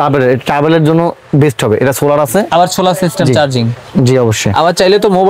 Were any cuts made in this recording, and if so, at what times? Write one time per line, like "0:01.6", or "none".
none

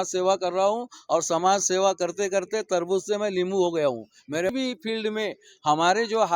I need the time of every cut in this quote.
0:04.5

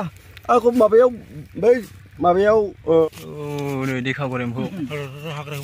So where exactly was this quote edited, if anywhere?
0:03.1

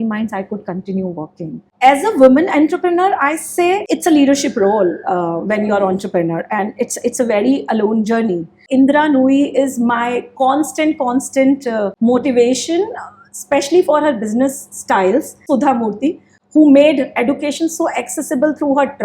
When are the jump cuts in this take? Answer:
0:01.6
0:08.6
0:15.4

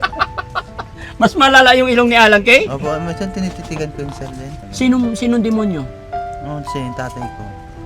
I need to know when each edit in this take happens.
0:04.5

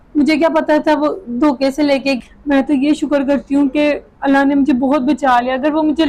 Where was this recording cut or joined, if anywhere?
0:02.2

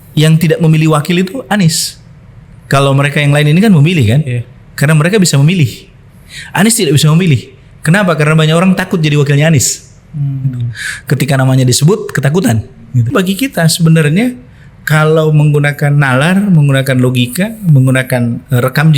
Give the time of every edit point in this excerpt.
0:13.1

